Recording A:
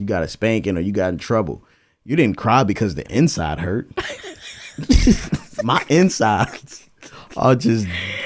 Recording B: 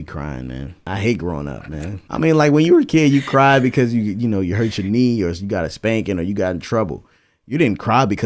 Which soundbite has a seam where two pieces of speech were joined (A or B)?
B